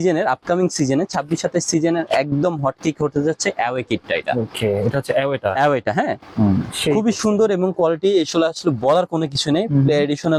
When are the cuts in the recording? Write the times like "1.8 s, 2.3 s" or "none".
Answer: none